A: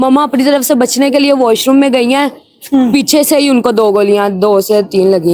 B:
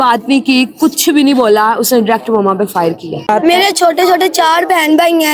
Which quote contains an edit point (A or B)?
B